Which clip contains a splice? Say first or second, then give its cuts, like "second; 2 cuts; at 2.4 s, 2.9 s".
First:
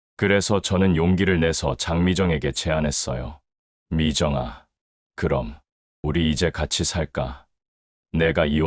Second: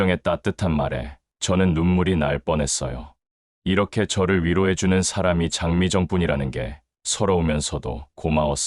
first; 1 cut; at 5.9 s